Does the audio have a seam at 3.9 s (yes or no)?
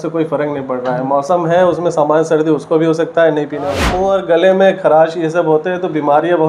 yes